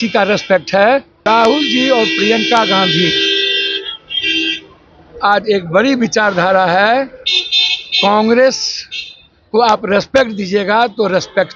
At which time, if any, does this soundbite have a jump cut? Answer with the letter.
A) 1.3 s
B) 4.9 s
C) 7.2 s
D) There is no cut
A